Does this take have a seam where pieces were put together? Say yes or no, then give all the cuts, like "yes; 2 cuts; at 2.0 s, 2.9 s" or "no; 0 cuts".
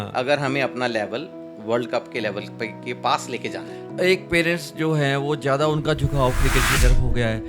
yes; 1 cut; at 3.9 s